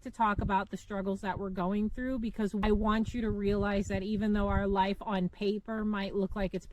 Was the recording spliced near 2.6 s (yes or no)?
yes